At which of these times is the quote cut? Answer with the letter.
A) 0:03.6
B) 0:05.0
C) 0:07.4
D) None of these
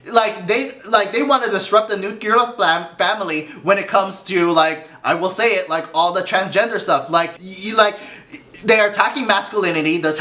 C